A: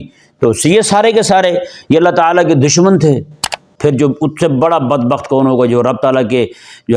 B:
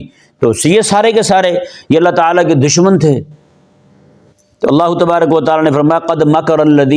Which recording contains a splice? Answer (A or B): A